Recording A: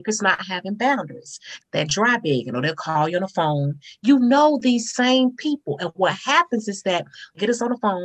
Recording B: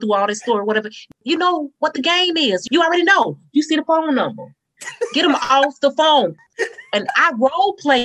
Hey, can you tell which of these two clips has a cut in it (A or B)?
B